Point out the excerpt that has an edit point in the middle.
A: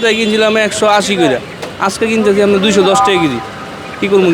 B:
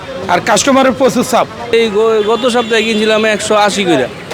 B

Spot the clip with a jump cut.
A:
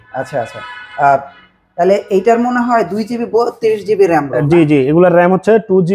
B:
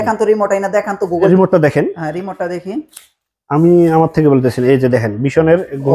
B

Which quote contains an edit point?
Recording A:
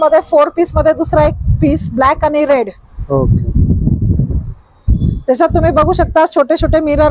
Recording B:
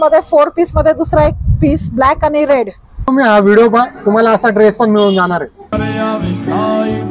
B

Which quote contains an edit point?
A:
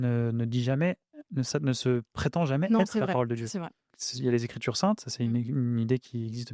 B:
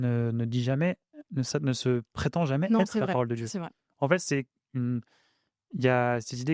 A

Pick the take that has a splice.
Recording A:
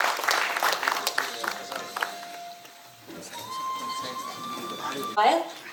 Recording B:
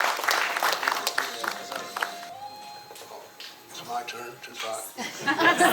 B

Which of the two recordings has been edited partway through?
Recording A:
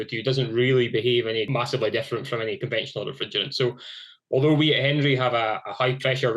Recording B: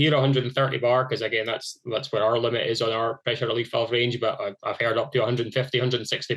A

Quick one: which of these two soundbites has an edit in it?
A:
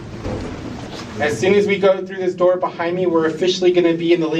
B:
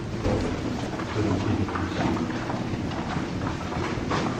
A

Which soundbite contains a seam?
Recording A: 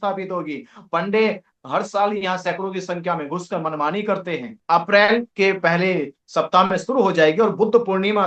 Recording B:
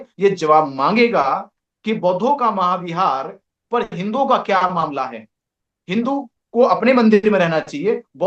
A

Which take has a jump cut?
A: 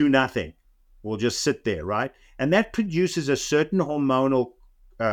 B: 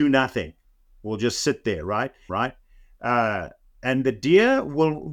B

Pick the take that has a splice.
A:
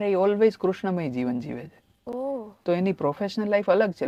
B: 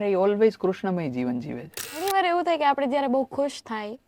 B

